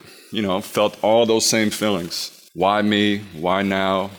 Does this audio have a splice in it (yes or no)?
no